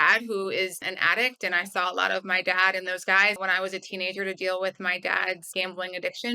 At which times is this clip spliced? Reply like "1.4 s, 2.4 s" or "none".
0.8 s, 3.4 s, 5.4 s